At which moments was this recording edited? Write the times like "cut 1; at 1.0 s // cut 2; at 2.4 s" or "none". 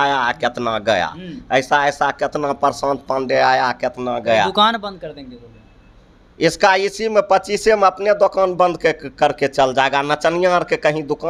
none